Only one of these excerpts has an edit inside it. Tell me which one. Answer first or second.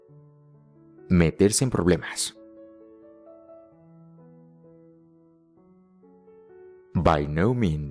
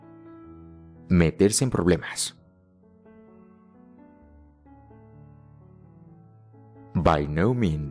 first